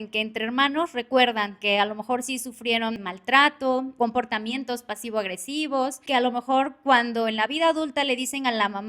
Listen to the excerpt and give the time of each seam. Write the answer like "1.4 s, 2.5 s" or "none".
3.0 s, 3.9 s, 6.0 s